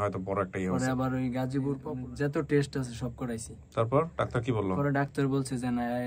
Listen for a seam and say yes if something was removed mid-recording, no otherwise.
yes